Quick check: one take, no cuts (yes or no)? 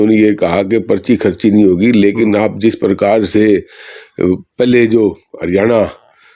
yes